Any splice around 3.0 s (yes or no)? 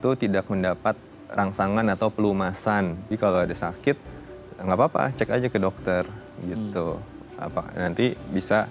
yes